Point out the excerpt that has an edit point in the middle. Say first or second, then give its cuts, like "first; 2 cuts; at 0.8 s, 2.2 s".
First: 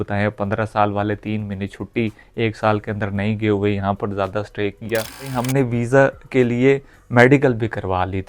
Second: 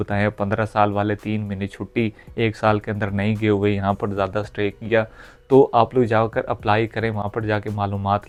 first; 1 cut; at 5.4 s